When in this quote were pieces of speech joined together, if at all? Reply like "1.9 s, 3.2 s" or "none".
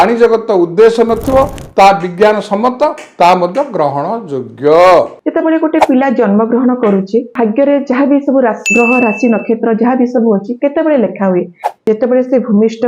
5.2 s, 7.3 s